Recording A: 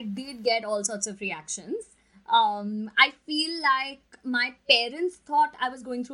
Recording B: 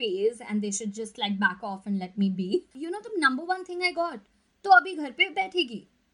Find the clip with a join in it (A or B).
B